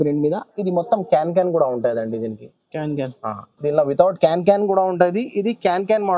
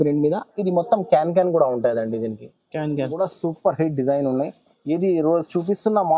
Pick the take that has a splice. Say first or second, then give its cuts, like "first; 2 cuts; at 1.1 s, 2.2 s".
second; 1 cut; at 3.1 s